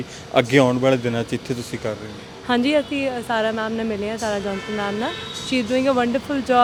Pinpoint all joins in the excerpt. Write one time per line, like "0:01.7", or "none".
none